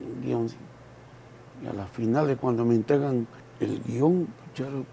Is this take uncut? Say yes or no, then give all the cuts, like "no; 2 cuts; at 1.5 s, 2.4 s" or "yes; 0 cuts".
no; 1 cut; at 3.4 s